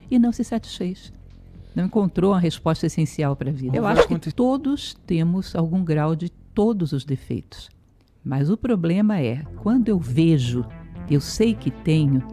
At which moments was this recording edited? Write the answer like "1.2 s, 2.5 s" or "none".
4.2 s